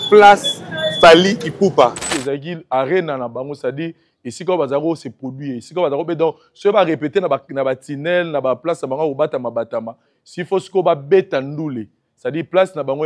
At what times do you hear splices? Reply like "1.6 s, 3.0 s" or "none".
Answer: 2.1 s